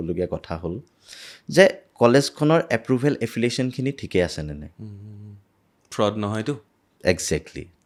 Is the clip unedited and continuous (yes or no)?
yes